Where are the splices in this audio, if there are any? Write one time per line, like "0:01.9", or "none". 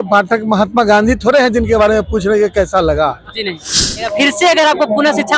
0:04.0